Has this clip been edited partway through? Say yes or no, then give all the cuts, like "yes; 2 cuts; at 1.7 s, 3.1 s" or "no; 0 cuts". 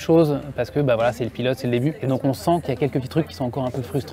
yes; 1 cut; at 2.0 s